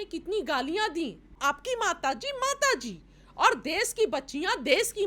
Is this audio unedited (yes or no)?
no